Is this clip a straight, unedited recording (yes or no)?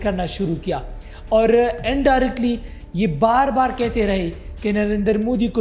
yes